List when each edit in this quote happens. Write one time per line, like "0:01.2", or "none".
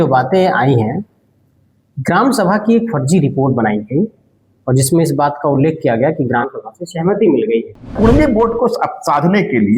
0:07.9